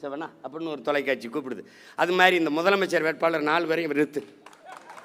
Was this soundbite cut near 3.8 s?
no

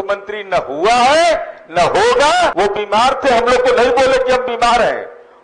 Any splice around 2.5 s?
yes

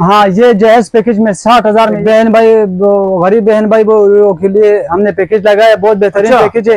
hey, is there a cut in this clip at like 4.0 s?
no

